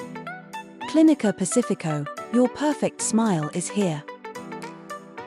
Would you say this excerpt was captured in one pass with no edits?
no; 2 cuts; at 0.9 s, 4.0 s

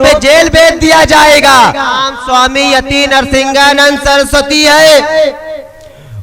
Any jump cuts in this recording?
yes; 1 cut; at 2.1 s

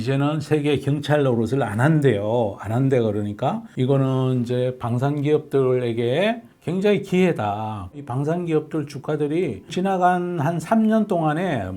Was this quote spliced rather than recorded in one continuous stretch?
yes; 3 cuts; at 3.7 s, 8.0 s, 9.7 s

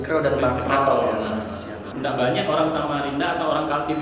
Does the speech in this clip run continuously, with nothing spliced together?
no; 1 cut; at 1.9 s

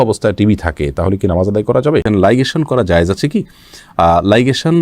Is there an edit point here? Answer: yes; 1 cut; at 2.0 s

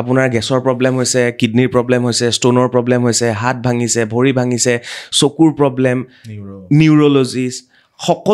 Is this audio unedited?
yes; 0 cuts

